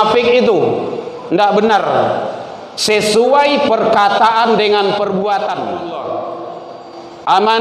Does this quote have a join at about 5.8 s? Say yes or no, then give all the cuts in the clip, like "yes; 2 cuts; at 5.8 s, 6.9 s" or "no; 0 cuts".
yes; 1 cut; at 5.8 s